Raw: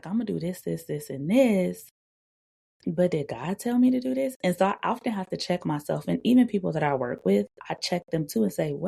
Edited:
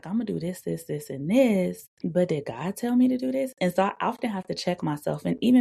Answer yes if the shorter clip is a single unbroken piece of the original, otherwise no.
no